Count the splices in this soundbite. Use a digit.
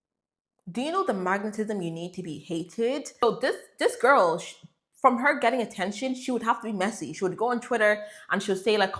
1